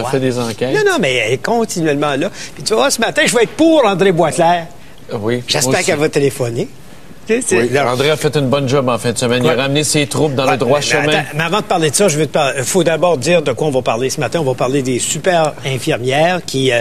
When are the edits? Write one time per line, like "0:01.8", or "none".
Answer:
0:10.0